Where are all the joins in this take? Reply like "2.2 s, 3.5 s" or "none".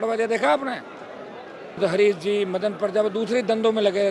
1.8 s